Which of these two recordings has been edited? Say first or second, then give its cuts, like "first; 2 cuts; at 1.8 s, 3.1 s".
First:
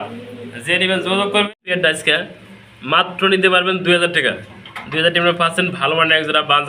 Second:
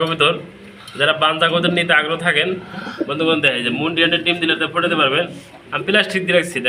first; 1 cut; at 1.5 s